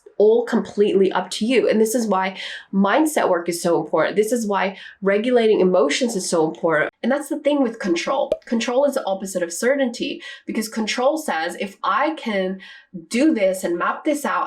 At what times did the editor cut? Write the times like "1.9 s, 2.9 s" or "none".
6.9 s